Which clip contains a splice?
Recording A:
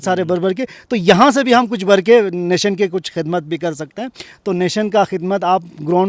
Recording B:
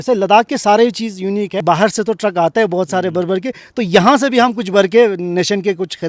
B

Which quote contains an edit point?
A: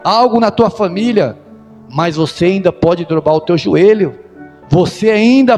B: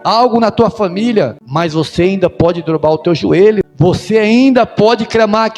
B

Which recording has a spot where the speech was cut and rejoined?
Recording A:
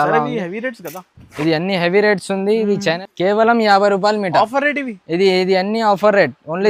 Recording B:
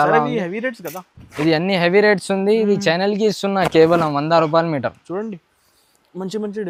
A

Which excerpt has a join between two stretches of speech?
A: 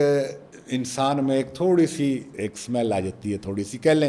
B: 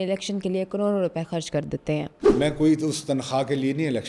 B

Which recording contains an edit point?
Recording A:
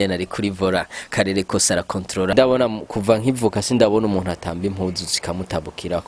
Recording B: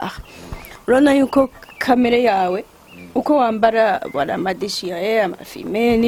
A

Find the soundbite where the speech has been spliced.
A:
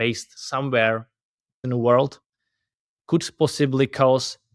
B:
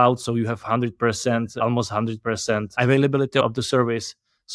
A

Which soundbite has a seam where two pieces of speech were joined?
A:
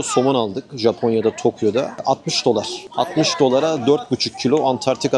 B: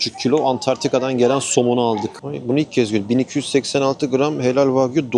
B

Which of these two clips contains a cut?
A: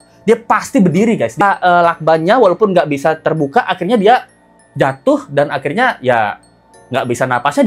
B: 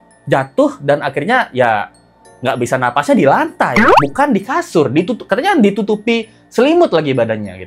A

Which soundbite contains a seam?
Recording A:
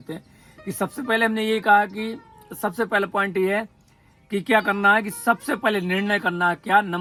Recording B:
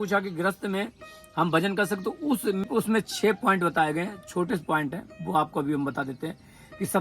B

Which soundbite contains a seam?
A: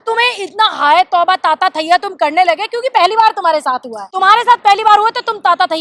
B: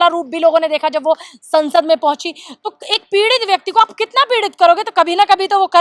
A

